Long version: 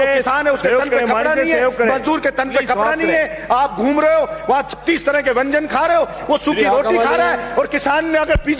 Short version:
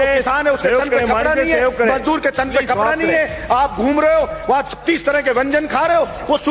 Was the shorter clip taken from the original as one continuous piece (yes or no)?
yes